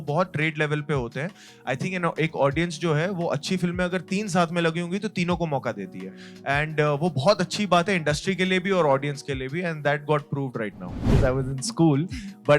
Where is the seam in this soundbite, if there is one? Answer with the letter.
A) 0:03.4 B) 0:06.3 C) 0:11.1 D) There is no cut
C